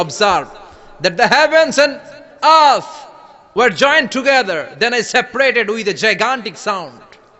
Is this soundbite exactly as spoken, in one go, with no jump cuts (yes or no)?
yes